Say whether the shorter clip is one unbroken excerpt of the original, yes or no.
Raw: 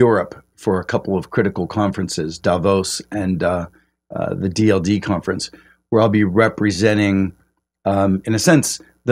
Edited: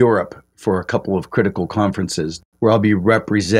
no